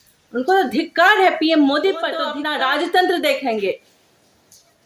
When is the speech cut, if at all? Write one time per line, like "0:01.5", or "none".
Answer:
0:02.3